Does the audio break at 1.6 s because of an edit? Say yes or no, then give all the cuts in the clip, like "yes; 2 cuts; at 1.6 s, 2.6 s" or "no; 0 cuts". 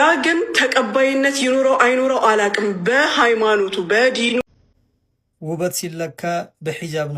no; 1 cut; at 4.4 s